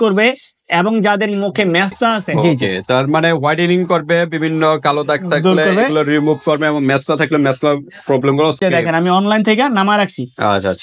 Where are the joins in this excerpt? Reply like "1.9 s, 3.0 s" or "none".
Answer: 2.3 s, 8.6 s